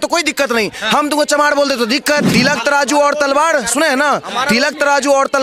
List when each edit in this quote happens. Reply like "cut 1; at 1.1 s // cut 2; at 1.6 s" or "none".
cut 1; at 2.3 s